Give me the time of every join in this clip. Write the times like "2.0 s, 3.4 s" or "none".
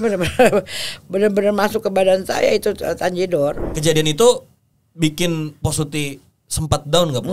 3.7 s